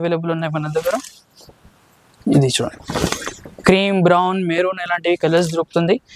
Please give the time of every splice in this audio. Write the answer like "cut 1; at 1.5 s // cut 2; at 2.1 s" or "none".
none